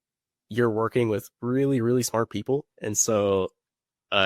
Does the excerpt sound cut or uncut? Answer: uncut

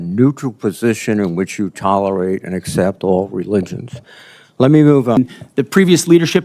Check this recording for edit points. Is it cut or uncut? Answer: cut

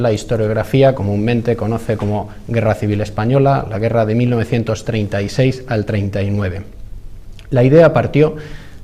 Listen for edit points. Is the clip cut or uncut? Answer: uncut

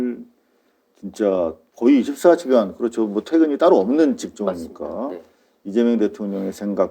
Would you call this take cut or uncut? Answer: cut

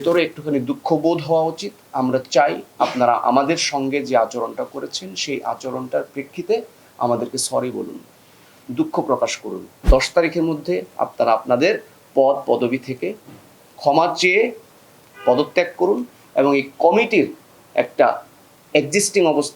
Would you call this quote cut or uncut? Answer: cut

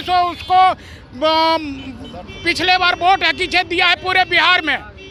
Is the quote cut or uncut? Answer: uncut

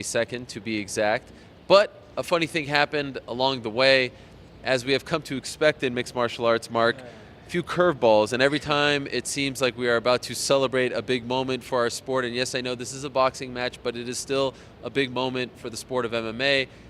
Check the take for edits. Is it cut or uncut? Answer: cut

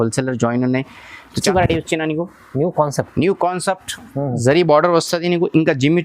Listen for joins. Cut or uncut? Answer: cut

